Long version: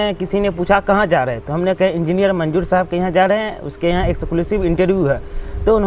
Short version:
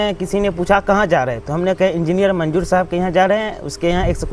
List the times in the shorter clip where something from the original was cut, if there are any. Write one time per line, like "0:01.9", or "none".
none